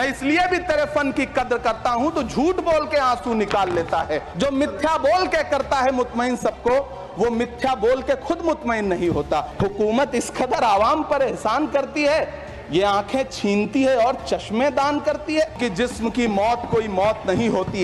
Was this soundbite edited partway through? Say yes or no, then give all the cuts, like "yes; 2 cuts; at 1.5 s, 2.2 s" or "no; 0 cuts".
yes; 3 cuts; at 4.3 s, 9.5 s, 15.6 s